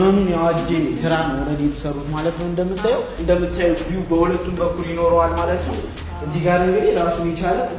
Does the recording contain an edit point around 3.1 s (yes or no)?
yes